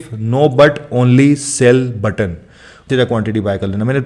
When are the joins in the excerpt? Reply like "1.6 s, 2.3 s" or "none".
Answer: 2.9 s